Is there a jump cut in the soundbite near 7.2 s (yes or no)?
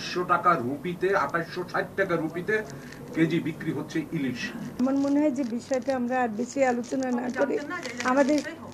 no